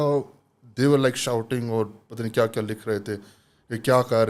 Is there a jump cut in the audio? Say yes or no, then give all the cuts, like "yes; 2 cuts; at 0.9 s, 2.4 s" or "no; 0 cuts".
no; 0 cuts